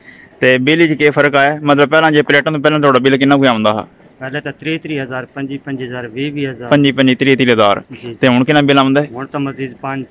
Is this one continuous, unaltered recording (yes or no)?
yes